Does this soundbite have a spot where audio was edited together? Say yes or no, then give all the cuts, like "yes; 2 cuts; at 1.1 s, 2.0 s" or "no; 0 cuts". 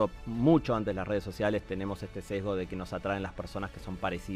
no; 0 cuts